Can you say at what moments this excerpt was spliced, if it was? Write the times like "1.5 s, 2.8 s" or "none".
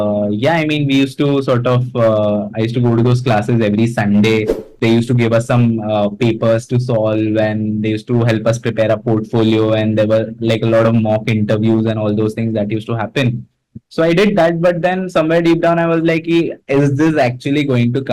4.6 s